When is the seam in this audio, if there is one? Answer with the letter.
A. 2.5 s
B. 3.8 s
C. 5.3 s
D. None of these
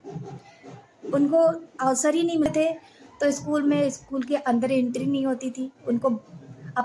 A